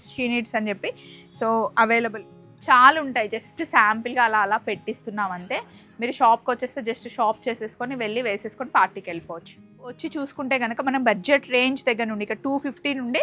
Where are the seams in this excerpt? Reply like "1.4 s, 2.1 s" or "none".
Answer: 2.2 s, 10.0 s